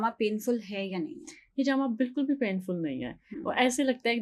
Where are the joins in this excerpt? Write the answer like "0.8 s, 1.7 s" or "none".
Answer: none